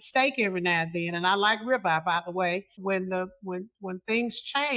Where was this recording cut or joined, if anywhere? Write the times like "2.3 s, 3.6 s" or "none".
2.8 s